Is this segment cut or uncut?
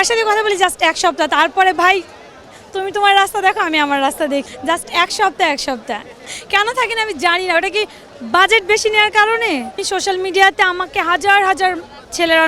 cut